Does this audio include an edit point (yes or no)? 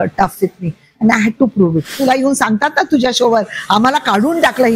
yes